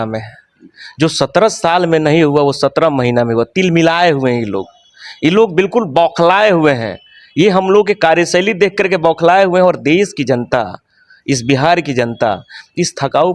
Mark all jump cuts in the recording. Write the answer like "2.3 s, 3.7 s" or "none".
none